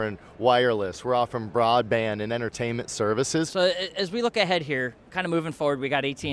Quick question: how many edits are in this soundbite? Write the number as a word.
two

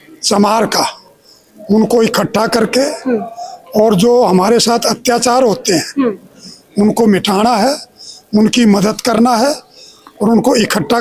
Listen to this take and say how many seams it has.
zero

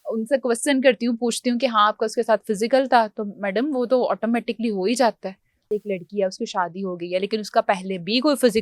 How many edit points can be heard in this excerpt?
one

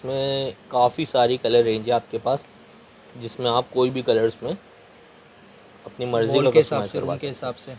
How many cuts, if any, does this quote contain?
zero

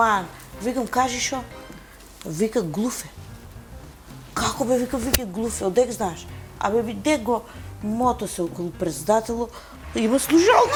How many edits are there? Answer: zero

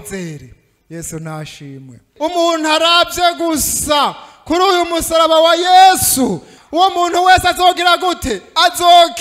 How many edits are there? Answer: two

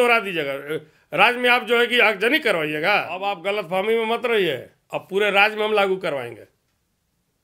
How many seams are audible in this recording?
one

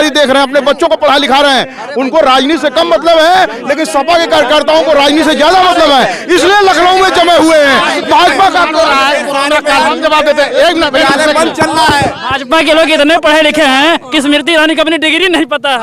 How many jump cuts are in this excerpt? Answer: zero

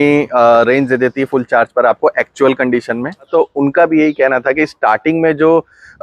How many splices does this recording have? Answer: one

